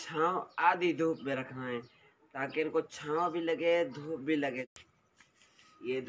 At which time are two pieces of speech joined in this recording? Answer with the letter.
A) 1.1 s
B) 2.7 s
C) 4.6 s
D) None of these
C